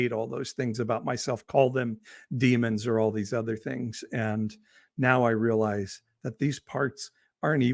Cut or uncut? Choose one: uncut